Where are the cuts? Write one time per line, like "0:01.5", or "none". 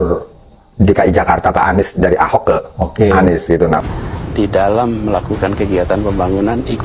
0:03.8